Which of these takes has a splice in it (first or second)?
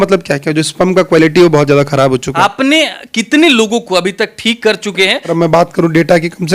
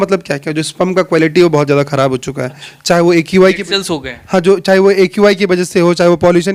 first